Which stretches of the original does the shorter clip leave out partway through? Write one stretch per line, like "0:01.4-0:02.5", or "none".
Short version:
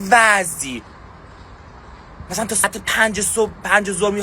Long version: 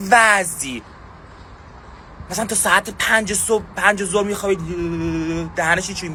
0:02.6-0:02.8